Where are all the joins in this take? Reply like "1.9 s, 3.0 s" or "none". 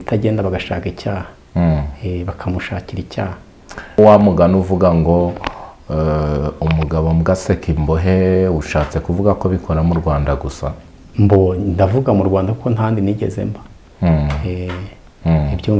none